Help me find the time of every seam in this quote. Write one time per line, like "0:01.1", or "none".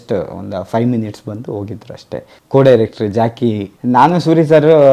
0:02.3
0:03.7